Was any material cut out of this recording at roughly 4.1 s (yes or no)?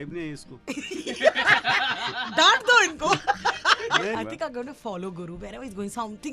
yes